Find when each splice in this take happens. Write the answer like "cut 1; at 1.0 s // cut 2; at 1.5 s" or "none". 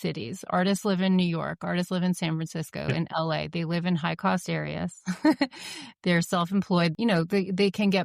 cut 1; at 6.9 s